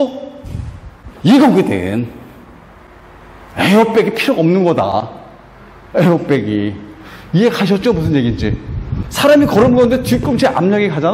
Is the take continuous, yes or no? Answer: yes